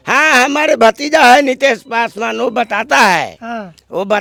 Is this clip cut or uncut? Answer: uncut